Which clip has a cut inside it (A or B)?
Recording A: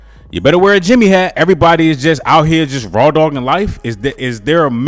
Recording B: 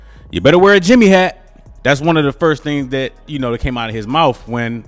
A